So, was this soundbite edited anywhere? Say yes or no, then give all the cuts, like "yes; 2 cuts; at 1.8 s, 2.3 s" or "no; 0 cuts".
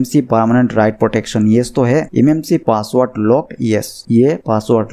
no; 0 cuts